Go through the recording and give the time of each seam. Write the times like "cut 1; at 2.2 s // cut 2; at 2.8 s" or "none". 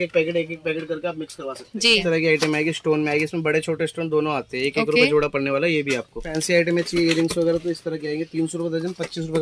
cut 1; at 2.0 s // cut 2; at 6.3 s